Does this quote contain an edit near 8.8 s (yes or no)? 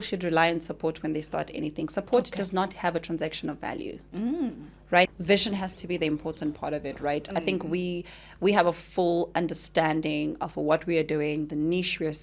no